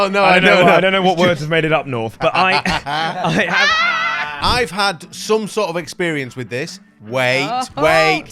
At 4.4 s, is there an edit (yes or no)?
yes